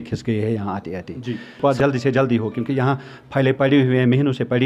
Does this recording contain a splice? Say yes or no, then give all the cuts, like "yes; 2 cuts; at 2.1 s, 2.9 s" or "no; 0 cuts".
yes; 1 cut; at 1.6 s